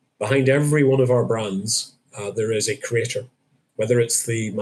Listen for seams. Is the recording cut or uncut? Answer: uncut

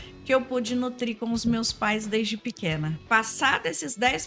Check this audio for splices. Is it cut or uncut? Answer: cut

